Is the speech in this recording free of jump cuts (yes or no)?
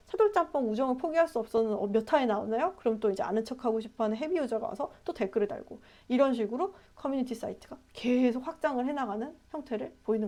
yes